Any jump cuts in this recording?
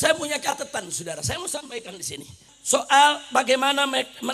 yes; 1 cut; at 2.5 s

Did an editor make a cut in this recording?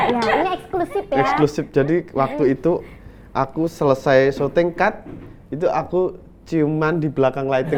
no; 0 cuts

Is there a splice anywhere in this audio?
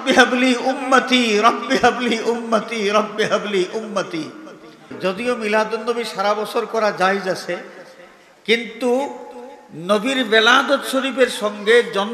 yes; 1 cut; at 4.9 s

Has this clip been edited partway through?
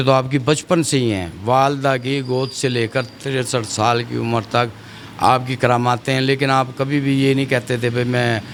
no; 0 cuts

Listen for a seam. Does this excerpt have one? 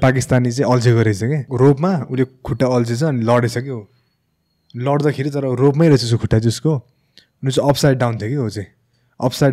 yes; 1 cut; at 1.5 s

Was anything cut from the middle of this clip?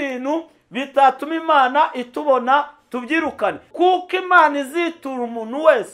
yes; 1 cut; at 3.7 s

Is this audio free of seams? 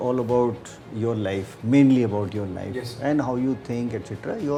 yes; 0 cuts

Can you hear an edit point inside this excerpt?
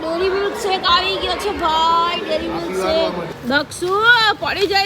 yes; 1 cut; at 3.3 s

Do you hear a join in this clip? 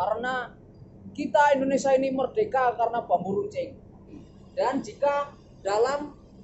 yes; 1 cut; at 4.1 s

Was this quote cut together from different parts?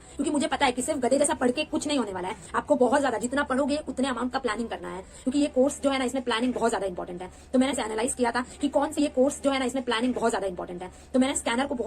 yes; 2 cuts; at 7.8 s, 9.0 s

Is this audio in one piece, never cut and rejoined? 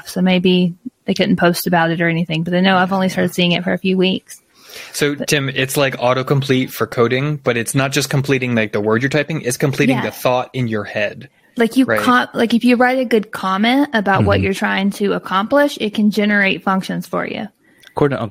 yes; 0 cuts

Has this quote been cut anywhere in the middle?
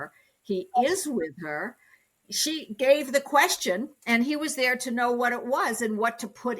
yes; 1 cut; at 2.3 s

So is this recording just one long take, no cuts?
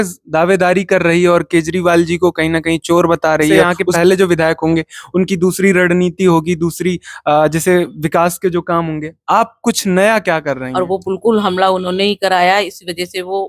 no; 2 cuts; at 3.7 s, 10.7 s

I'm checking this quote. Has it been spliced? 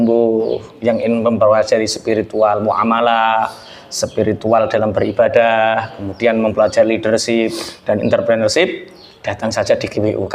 no; 0 cuts

